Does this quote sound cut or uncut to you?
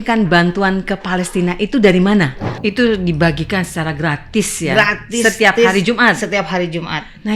cut